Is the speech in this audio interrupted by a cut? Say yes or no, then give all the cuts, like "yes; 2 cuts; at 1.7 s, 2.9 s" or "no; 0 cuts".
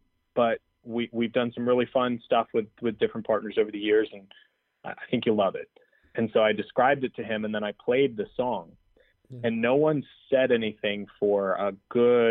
no; 0 cuts